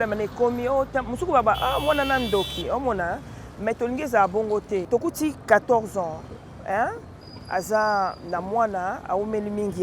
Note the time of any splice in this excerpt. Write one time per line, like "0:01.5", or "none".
0:04.8